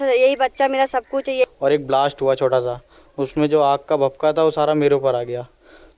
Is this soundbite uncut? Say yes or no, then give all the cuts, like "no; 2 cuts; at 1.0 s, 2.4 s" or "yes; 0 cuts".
no; 1 cut; at 1.4 s